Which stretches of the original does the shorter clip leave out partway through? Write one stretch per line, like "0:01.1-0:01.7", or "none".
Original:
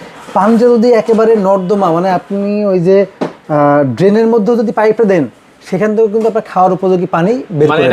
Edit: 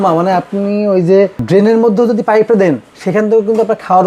0:03.2-0:03.9
0:05.4-0:05.6